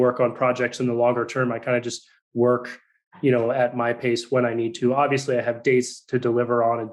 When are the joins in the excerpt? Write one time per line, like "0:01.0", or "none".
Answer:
none